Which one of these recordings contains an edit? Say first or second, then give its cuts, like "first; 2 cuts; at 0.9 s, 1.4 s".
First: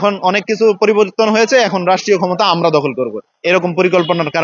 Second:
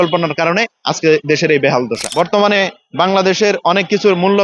second; 1 cut; at 2.0 s